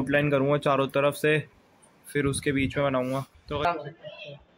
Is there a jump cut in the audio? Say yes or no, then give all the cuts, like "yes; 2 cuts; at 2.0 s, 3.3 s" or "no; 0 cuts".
yes; 1 cut; at 3.6 s